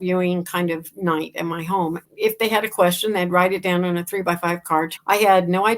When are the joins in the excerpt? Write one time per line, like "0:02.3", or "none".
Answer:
0:02.0
0:04.9